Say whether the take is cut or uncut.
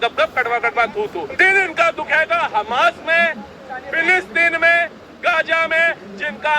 cut